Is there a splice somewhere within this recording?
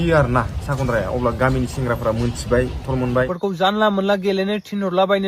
yes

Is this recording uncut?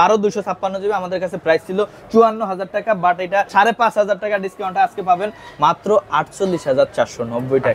yes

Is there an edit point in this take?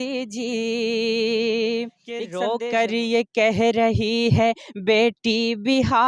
yes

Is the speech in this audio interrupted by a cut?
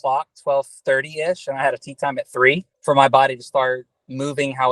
yes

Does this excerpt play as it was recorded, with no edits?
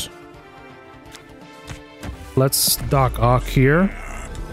yes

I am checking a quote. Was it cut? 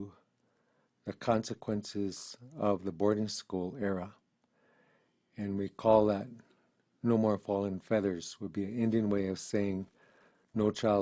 no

